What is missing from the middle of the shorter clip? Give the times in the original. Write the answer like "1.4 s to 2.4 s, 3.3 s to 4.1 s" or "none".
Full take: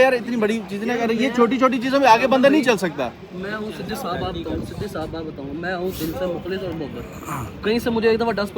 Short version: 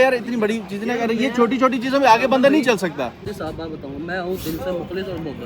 3.2 s to 4.8 s

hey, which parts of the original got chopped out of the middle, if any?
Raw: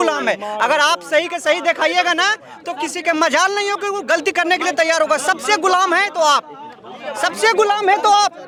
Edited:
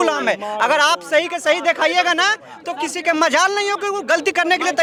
none

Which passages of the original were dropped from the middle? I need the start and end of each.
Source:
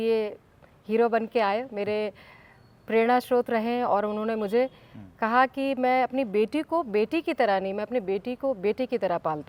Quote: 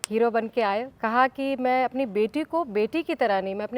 1.7 s to 5.1 s

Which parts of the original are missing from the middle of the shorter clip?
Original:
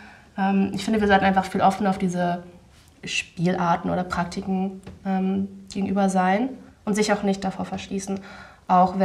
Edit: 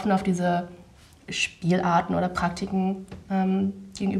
none

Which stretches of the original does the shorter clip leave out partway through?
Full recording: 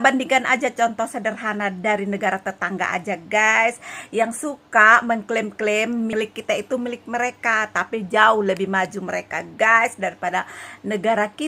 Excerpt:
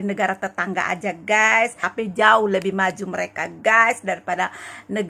3.9 s to 7.8 s

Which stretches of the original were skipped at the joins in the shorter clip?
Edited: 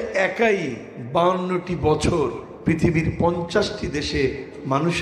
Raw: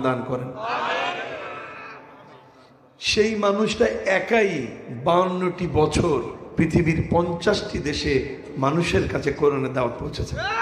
none

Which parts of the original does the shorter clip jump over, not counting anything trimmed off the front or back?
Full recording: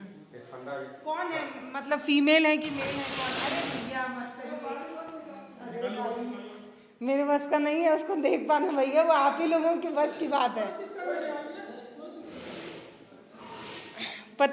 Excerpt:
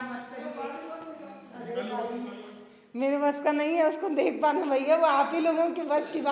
none

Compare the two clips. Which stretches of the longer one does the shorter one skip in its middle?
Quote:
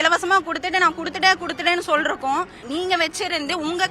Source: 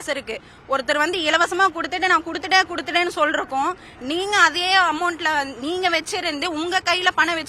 3.9 s to 5.5 s

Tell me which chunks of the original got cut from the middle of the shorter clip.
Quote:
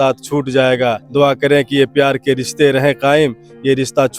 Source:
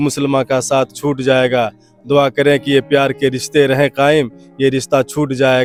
1.7 s to 2.0 s

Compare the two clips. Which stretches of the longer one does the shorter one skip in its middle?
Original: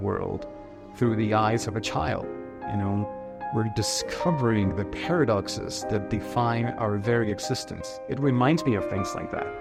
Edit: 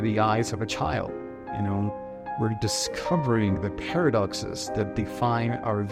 none

